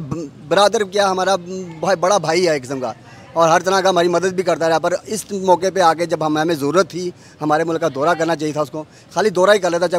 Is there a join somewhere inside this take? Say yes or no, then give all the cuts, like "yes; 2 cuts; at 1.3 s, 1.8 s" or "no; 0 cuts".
no; 0 cuts